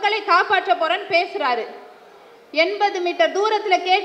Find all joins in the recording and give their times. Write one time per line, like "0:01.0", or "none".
none